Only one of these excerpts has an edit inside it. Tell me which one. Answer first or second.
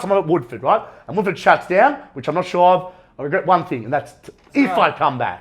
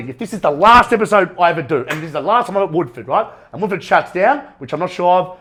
first